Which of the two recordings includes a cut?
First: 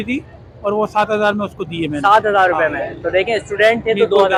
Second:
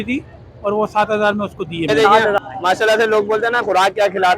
second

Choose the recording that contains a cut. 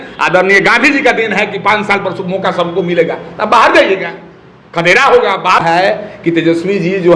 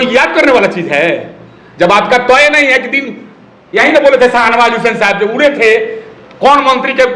first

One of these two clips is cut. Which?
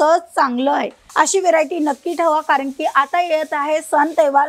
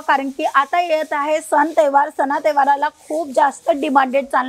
first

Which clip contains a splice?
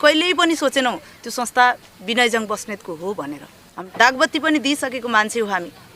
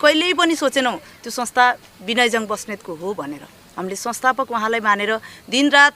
first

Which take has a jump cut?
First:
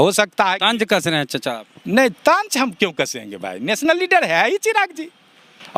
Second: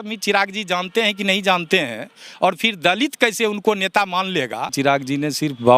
second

